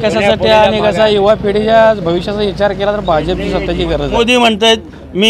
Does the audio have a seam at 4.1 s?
yes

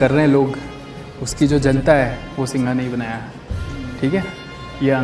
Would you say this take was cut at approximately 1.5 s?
no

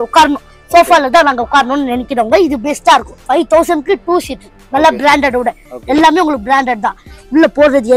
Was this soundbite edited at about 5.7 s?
no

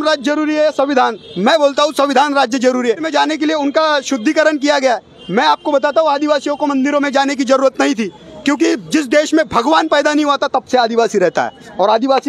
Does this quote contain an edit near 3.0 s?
yes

